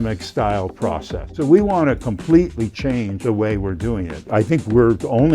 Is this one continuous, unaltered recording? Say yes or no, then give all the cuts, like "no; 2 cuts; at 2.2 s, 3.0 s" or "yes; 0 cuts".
no; 3 cuts; at 1.2 s, 2.8 s, 4.2 s